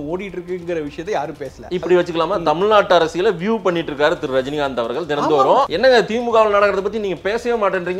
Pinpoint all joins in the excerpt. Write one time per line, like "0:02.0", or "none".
0:01.7
0:05.7